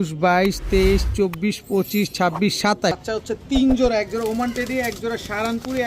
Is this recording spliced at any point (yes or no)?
yes